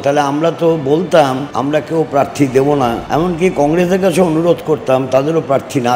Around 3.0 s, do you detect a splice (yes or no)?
yes